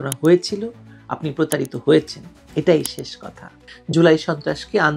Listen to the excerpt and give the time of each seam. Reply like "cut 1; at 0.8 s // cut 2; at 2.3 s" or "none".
cut 1; at 3.7 s